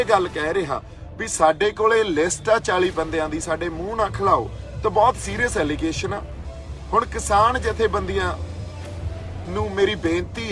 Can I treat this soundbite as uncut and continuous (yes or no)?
yes